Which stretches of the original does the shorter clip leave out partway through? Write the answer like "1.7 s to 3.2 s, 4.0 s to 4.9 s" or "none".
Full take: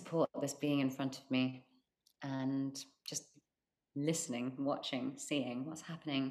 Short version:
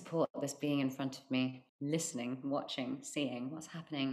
1.7 s to 3.8 s